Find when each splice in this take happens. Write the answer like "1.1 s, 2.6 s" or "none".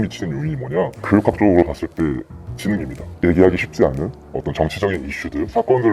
3.1 s